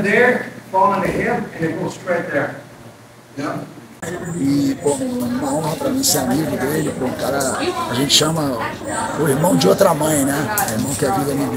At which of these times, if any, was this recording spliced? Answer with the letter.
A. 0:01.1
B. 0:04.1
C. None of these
B